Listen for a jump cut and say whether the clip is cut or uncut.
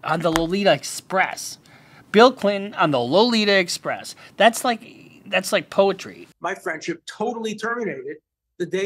cut